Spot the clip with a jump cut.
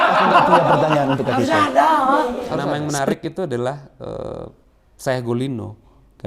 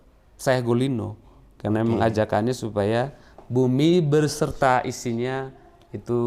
first; 1 cut; at 2.7 s

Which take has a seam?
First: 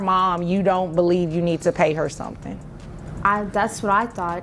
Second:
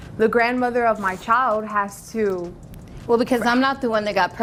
first; 1 cut; at 3.1 s

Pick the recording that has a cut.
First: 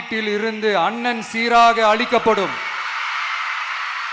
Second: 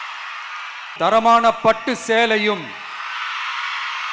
second; 1 cut; at 0.9 s

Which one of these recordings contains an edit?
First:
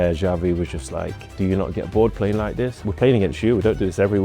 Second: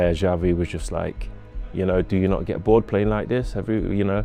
first; 2 cuts; at 1.4 s, 2.8 s

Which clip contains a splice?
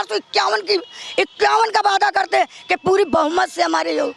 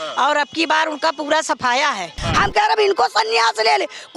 second; 1 cut; at 2.2 s

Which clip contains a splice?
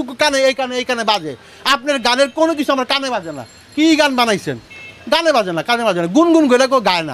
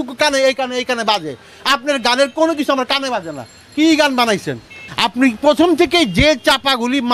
second; 1 cut; at 4.8 s

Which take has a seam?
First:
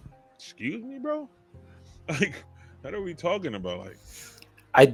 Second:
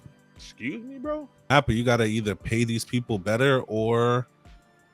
second; 1 cut; at 1.5 s

